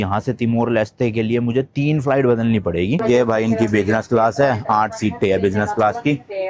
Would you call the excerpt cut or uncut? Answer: cut